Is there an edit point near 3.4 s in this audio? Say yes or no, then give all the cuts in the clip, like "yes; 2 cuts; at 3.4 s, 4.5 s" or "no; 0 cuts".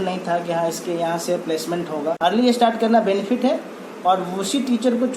no; 1 cut; at 2.2 s